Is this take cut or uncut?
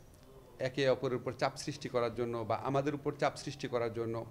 uncut